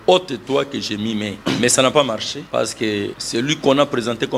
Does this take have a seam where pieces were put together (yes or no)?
yes